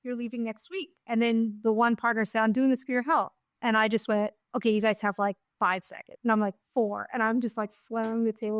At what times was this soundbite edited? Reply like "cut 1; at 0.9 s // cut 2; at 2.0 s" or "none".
cut 1; at 0.9 s